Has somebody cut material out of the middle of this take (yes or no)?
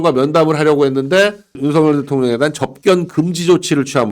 yes